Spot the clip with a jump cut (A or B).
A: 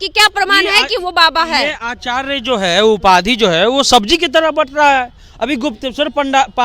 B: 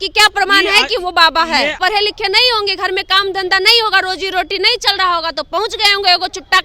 B